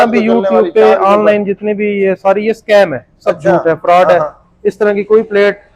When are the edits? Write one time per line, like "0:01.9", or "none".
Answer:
none